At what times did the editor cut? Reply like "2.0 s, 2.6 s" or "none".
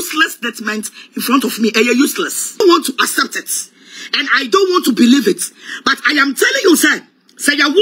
2.6 s